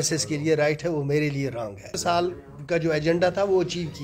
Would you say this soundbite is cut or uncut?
cut